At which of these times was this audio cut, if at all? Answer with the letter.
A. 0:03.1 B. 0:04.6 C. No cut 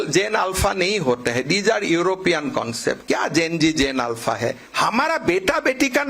B